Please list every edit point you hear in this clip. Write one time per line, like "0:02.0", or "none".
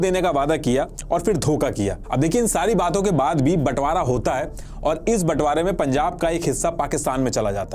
none